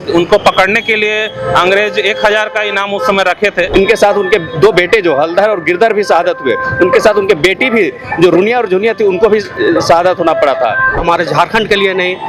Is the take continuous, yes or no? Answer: no